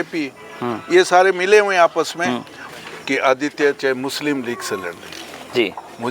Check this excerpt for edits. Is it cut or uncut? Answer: cut